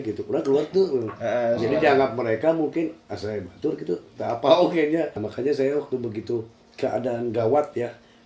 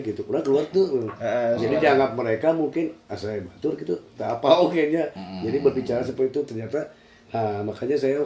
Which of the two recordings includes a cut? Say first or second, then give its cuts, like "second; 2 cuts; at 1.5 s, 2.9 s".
first; 1 cut; at 5.2 s